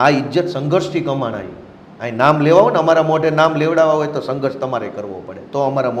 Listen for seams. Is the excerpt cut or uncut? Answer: uncut